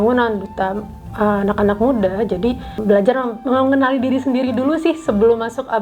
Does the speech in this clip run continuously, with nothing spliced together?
no; 1 cut; at 2.8 s

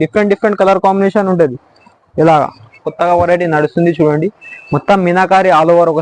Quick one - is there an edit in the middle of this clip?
yes; 1 cut; at 2.9 s

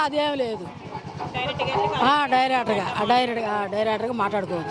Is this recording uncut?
yes; 0 cuts

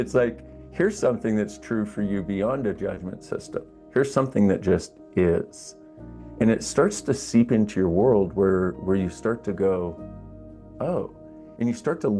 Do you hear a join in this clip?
no; 0 cuts

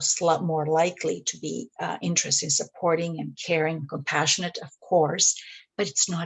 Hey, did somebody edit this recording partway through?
no; 0 cuts

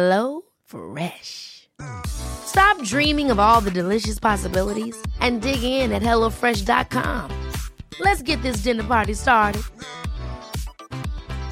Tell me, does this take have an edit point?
no; 0 cuts

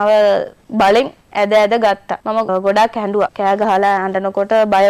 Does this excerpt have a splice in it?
no; 0 cuts

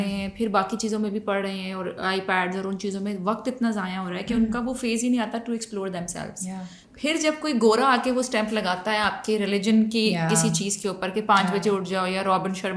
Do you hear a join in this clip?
no; 0 cuts

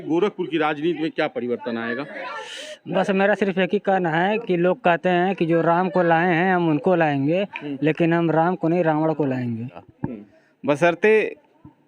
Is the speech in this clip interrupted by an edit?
yes; 1 cut; at 9.9 s

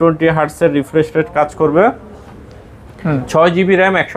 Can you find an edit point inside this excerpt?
no; 0 cuts

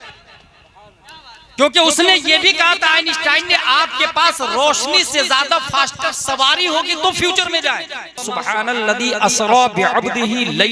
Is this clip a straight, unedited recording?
no; 1 cut; at 8.3 s

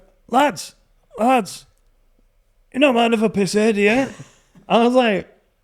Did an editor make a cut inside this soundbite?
no; 0 cuts

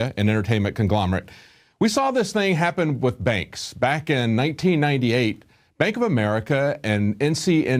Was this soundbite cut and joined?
yes; 1 cut; at 5.5 s

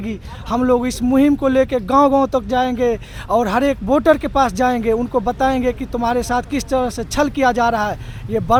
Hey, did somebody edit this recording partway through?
no; 0 cuts

